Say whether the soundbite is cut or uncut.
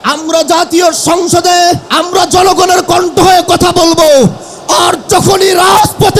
cut